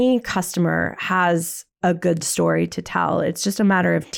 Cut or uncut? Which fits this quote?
uncut